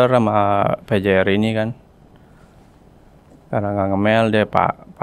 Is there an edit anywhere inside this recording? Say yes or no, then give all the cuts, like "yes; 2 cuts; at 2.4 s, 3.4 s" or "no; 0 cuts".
no; 0 cuts